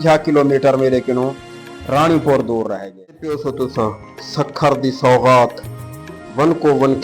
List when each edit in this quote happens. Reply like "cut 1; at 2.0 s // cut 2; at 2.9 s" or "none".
cut 1; at 3.1 s